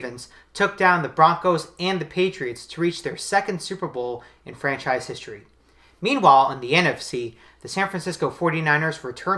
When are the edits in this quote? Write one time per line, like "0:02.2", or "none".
0:01.1